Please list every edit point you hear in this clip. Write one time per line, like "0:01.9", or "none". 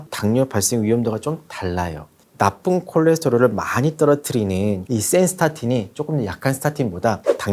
none